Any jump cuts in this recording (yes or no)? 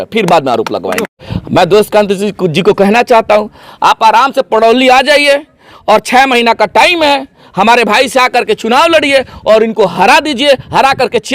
yes